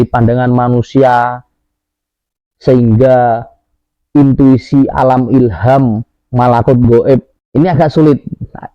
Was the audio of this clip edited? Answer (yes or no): yes